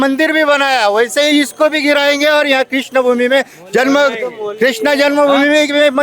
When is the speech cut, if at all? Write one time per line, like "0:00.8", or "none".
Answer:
none